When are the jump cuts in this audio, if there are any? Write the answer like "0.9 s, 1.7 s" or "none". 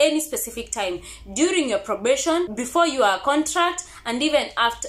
2.6 s